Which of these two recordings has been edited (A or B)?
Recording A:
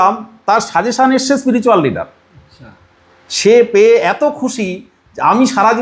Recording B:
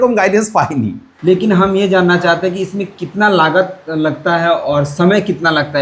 B